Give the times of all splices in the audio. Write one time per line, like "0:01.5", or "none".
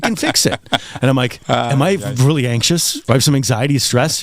0:01.4
0:03.0

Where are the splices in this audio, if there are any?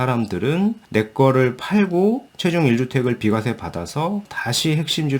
none

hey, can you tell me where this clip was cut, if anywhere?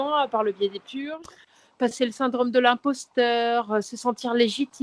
0:01.6

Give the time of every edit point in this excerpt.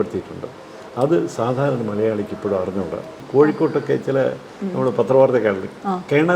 0:03.2

